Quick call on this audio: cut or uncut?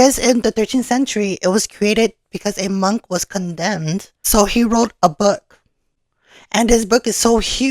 cut